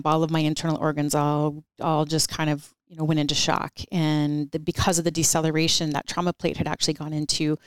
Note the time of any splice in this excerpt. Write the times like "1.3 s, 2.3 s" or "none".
1.7 s, 2.8 s